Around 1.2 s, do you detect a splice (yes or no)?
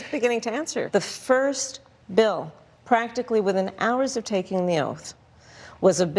yes